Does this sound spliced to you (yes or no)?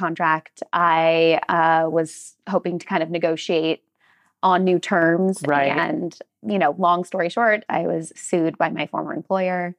yes